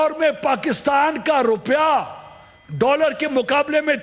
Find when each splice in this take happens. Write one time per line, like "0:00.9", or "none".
none